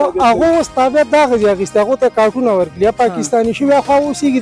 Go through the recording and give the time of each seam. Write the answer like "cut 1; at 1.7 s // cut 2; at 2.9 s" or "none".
none